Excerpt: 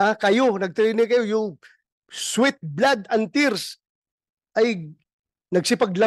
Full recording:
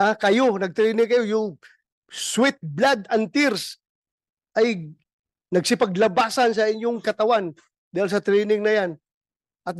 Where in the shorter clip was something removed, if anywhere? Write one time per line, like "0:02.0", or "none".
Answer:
none